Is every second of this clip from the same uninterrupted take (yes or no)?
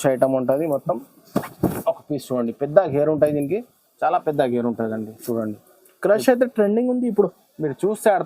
yes